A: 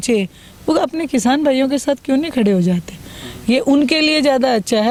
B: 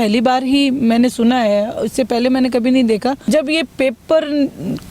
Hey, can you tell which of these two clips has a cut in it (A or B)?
B